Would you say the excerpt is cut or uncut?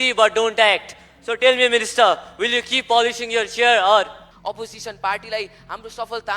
cut